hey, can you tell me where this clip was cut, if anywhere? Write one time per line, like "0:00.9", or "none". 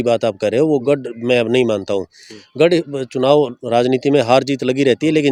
none